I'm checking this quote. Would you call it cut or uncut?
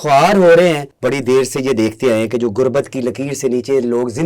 cut